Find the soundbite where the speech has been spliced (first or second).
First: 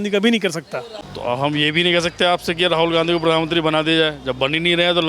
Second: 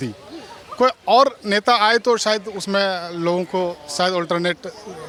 first